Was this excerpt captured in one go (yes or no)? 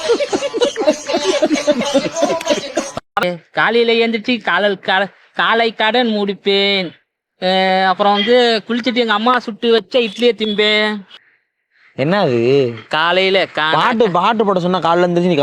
no